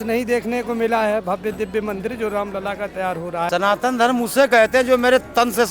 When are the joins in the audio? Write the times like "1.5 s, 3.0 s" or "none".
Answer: 3.5 s